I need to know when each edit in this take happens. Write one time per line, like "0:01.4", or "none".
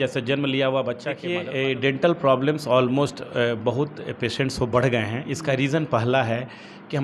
0:01.3